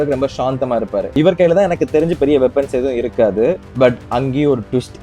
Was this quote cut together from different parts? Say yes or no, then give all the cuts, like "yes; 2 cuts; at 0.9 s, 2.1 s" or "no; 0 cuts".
yes; 1 cut; at 1.2 s